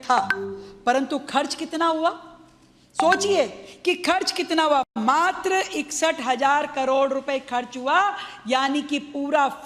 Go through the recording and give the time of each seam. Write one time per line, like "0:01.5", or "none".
none